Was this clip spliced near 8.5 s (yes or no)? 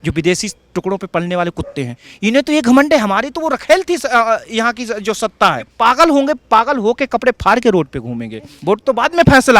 yes